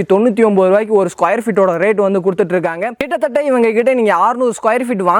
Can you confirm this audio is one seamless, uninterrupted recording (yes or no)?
yes